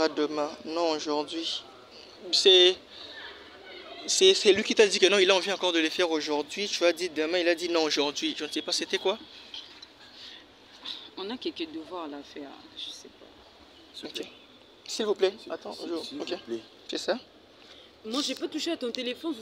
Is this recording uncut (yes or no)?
yes